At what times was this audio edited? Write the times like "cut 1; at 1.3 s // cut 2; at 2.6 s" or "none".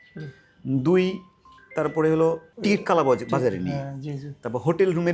none